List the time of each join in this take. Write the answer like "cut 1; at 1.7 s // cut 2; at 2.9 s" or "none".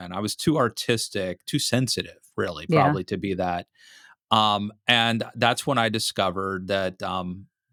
none